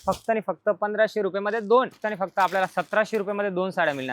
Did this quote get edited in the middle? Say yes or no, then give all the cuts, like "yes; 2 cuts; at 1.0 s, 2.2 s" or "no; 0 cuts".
yes; 1 cut; at 2.0 s